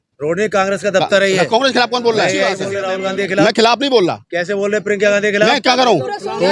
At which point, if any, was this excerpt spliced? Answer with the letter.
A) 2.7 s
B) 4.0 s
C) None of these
A